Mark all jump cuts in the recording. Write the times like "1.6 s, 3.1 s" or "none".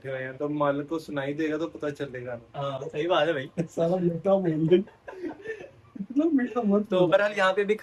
none